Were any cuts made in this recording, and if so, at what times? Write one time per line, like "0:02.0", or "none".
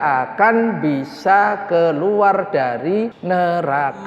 0:03.2